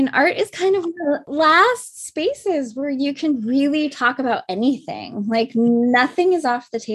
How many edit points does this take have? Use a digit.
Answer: 1